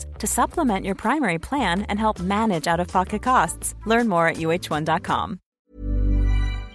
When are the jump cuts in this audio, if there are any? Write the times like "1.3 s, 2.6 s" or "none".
5.4 s